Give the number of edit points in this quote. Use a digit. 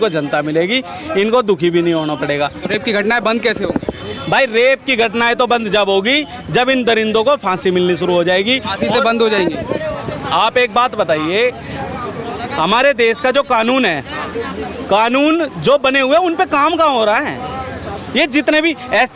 0